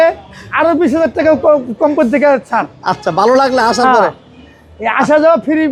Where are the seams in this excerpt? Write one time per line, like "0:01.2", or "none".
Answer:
none